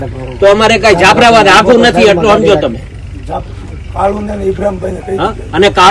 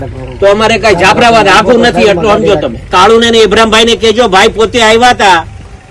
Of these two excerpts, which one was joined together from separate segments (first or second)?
second